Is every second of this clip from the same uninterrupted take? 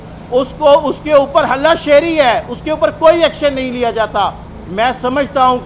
yes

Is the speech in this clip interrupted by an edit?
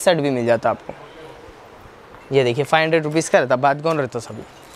no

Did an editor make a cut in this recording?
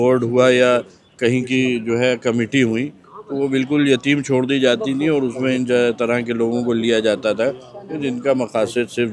no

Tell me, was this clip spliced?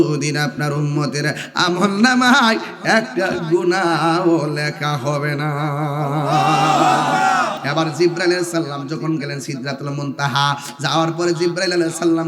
yes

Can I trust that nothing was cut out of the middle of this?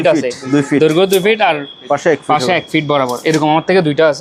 yes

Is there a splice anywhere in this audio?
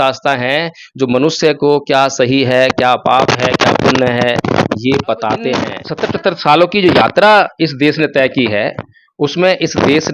yes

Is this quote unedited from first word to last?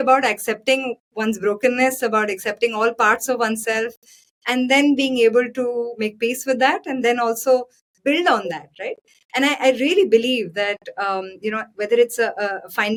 yes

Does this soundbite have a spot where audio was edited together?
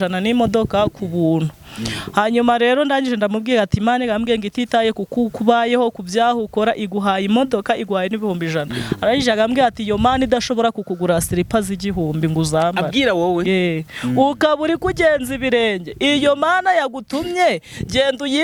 no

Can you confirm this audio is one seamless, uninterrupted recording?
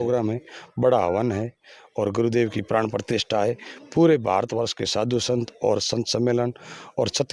yes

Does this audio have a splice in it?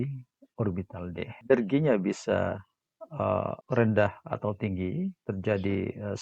yes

